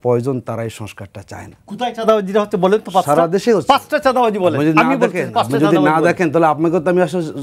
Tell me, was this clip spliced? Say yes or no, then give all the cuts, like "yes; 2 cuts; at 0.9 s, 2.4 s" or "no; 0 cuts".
yes; 1 cut; at 1.6 s